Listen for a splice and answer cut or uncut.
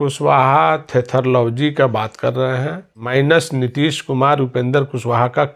cut